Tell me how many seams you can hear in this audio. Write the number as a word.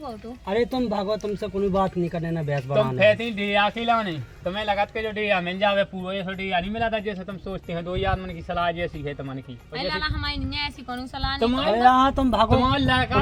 zero